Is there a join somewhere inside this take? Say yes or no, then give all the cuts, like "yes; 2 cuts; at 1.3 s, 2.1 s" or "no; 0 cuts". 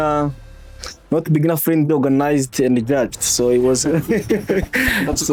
no; 0 cuts